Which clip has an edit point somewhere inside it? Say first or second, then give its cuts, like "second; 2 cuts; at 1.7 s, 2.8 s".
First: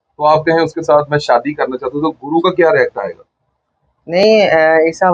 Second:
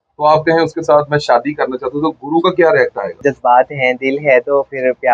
second; 1 cut; at 3.2 s